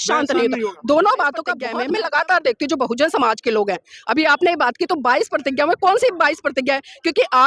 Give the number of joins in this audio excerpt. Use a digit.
1